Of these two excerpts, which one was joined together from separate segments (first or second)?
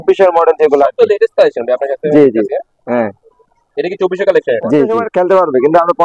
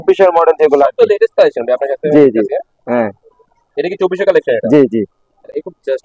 first